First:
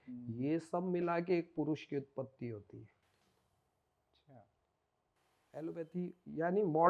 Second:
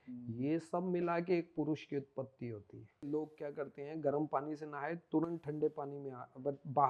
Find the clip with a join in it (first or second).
second